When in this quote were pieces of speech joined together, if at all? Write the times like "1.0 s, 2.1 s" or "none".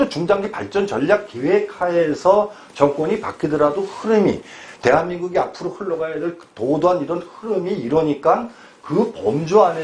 none